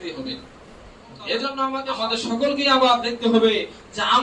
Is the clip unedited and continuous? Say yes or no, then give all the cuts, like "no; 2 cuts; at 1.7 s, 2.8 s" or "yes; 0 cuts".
no; 1 cut; at 1.9 s